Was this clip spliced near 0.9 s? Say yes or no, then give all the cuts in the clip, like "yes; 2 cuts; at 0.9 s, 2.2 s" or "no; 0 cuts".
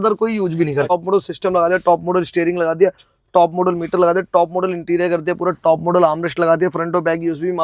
yes; 1 cut; at 0.9 s